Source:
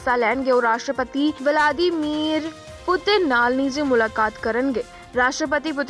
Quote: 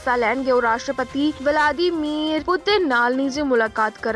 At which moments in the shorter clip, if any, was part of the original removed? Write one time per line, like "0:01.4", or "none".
0:02.4